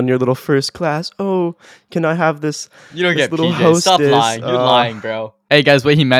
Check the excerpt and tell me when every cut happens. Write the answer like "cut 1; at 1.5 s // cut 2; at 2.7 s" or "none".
cut 1; at 5.3 s